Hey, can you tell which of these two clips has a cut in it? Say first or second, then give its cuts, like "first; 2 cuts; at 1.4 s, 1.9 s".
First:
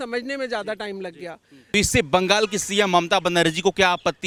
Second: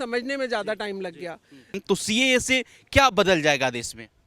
second; 1 cut; at 1.5 s